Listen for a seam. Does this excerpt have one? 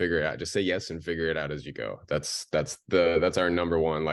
no; 0 cuts

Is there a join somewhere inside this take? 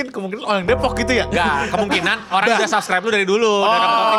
no; 0 cuts

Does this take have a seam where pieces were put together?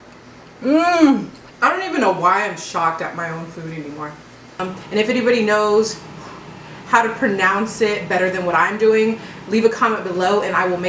yes; 2 cuts; at 1.4 s, 4.6 s

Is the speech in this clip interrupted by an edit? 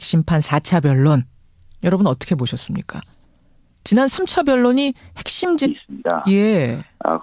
no; 0 cuts

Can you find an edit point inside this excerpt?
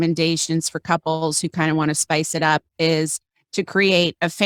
no; 0 cuts

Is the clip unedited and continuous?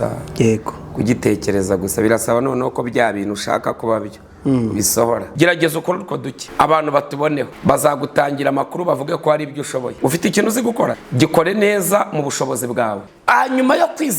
no; 6 cuts; at 5.3 s, 6.4 s, 7.5 s, 9.9 s, 11.0 s, 13.1 s

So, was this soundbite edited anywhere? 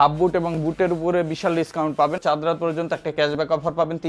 yes; 1 cut; at 2.2 s

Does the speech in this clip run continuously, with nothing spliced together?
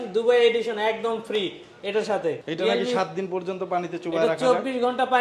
no; 1 cut; at 2.4 s

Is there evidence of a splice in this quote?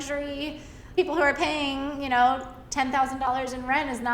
yes; 1 cut; at 0.9 s

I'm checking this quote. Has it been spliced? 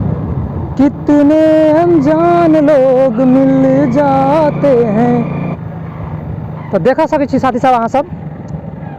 yes; 1 cut; at 5.6 s

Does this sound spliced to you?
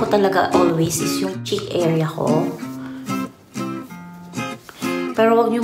yes; 1 cut; at 1.4 s

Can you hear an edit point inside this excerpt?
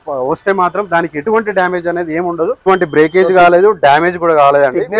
yes; 1 cut; at 2.7 s

